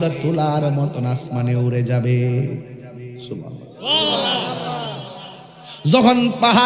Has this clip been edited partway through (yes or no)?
no